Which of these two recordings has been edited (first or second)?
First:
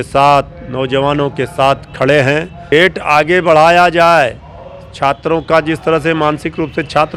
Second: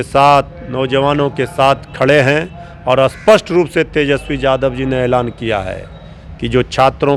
first